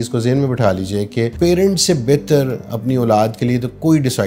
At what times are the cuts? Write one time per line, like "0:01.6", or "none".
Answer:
0:01.3

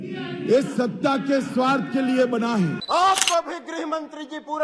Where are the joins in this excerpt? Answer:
0:02.8

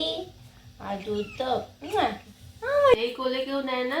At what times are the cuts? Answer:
0:02.9

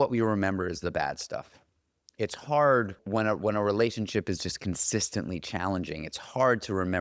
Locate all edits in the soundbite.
0:03.0

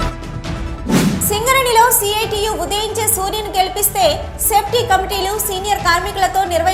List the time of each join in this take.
none

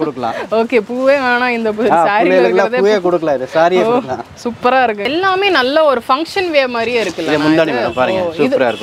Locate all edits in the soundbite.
0:05.1

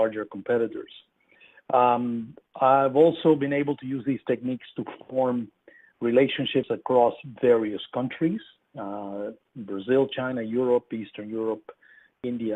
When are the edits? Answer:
0:04.1

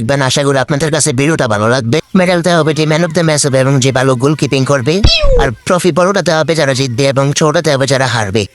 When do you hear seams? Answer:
0:02.0

